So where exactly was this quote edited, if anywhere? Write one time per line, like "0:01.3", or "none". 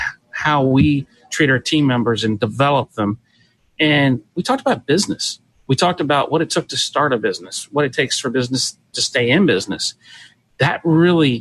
none